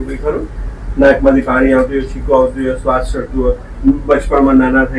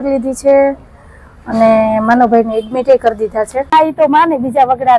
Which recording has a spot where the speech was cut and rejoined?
second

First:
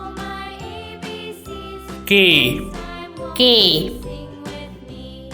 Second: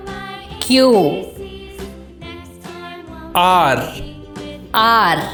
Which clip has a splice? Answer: first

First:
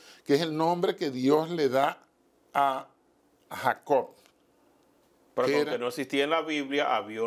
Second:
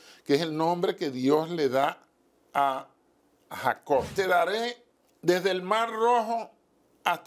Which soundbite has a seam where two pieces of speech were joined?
second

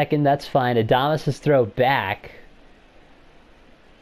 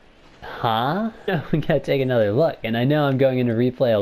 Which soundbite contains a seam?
second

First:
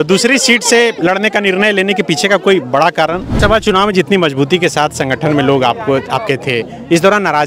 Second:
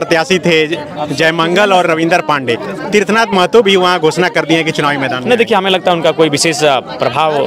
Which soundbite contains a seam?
first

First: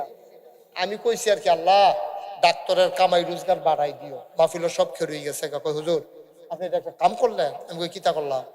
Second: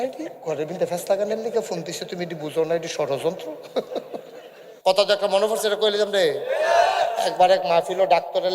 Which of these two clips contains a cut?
second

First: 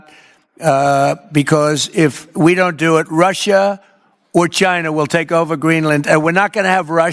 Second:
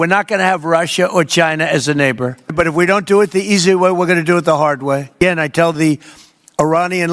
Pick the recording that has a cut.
second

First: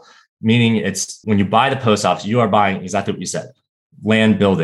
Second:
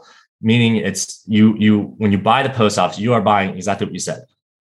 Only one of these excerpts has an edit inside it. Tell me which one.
first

